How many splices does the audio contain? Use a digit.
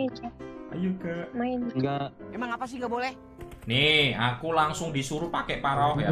1